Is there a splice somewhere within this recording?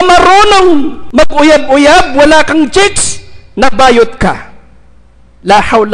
yes; 1 cut; at 1.0 s

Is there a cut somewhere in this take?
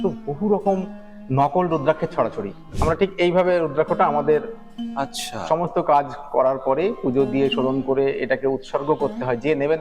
yes; 1 cut; at 2.7 s

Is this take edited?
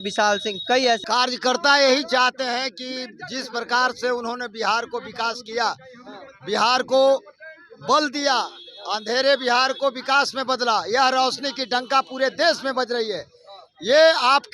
yes; 1 cut; at 1.0 s

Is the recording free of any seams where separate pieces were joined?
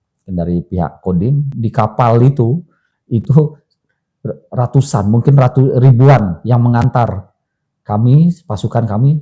no; 1 cut; at 1.5 s

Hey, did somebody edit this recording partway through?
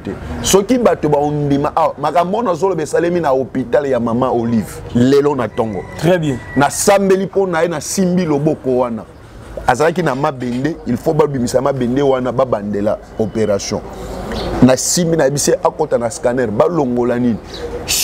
no; 0 cuts

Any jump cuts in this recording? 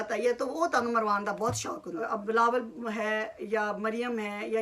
yes; 1 cut; at 2.0 s

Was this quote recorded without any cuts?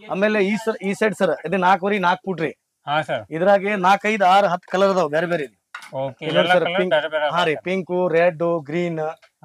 yes; 0 cuts

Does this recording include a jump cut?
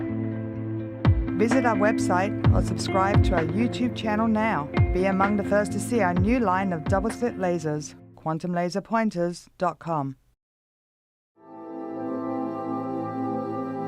yes; 1 cut; at 4.9 s

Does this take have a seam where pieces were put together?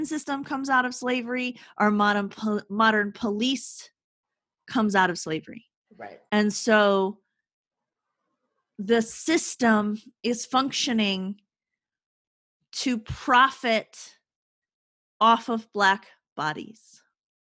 no; 0 cuts

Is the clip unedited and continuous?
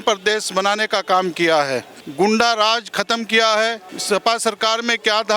no; 2 cuts; at 2.0 s, 3.9 s

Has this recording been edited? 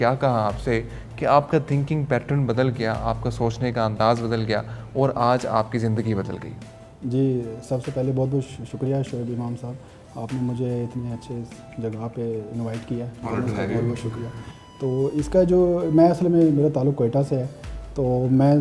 no; 0 cuts

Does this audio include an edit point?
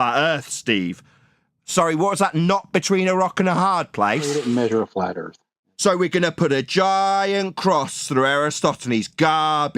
yes; 1 cut; at 4.3 s

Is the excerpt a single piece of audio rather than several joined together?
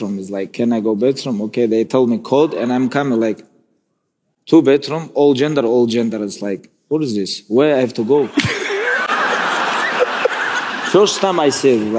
yes; 0 cuts

